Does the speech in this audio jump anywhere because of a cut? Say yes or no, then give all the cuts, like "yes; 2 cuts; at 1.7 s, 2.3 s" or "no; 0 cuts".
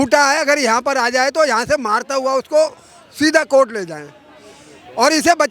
no; 0 cuts